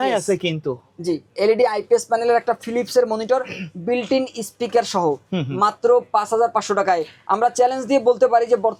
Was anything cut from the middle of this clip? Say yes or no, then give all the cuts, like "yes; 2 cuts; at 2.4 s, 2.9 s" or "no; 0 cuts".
no; 0 cuts